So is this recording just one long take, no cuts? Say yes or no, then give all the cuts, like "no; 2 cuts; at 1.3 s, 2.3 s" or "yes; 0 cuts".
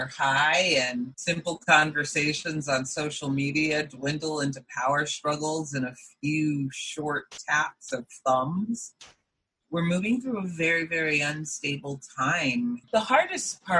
yes; 0 cuts